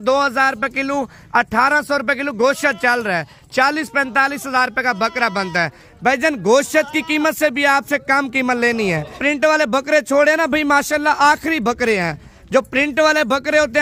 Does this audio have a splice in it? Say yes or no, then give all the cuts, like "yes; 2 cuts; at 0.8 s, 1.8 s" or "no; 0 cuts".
yes; 1 cut; at 9.2 s